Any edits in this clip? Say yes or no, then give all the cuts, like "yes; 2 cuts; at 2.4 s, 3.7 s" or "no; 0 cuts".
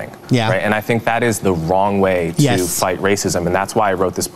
no; 0 cuts